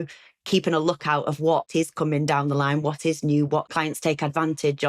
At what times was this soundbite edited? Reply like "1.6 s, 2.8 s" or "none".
1.7 s, 3.7 s